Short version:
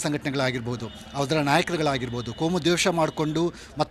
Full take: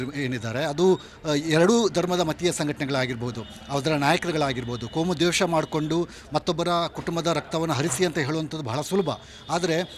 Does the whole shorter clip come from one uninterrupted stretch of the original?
yes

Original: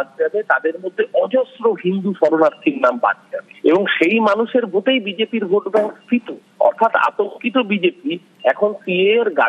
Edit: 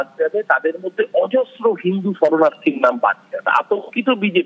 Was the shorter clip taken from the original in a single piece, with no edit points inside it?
no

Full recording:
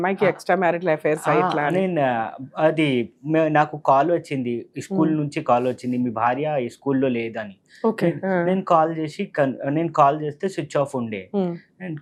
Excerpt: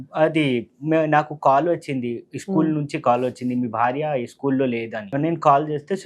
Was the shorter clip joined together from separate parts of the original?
yes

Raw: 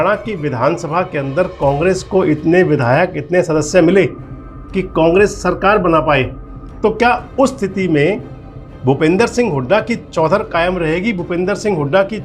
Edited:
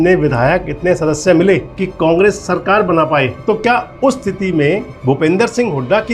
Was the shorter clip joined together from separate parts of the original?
yes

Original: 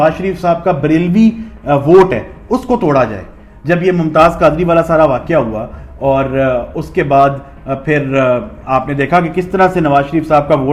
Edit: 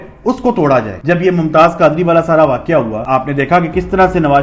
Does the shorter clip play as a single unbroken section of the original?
no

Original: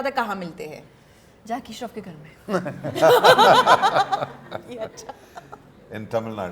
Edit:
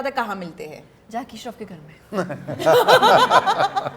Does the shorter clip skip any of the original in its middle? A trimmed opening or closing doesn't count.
yes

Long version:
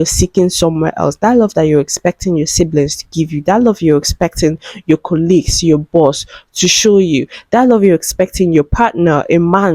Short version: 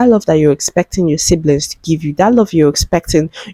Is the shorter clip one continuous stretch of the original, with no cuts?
yes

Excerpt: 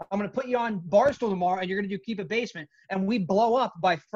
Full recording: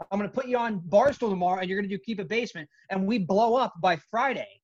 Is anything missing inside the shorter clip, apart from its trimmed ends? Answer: no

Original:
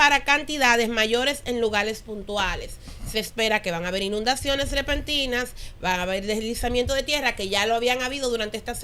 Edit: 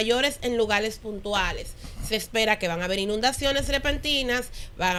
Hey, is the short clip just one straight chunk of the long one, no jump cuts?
yes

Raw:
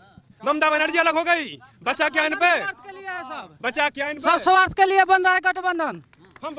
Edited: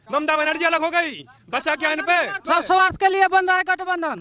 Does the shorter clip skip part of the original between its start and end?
yes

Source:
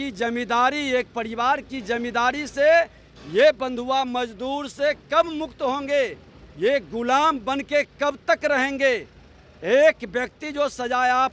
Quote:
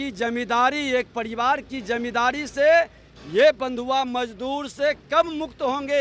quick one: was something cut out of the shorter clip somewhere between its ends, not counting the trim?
no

